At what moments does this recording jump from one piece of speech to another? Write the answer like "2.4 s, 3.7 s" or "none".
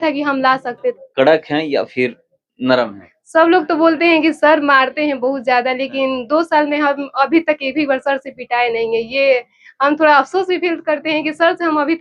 1.0 s